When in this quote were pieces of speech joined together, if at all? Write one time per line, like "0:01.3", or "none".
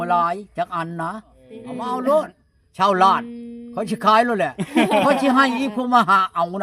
0:01.7

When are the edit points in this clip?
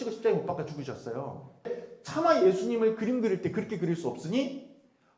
0:01.8

